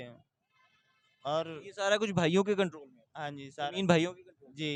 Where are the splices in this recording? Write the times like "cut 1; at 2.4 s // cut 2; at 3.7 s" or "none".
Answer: none